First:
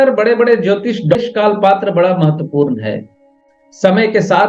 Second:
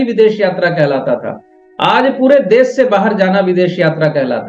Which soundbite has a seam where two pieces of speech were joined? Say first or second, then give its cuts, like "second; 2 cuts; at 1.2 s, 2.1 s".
first; 1 cut; at 1.1 s